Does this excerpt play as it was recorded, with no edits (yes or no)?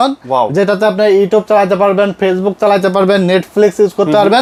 yes